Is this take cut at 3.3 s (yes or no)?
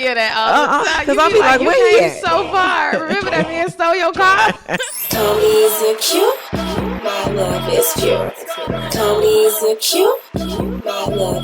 no